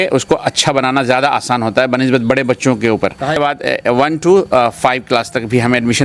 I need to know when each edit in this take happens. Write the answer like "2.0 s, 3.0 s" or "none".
3.4 s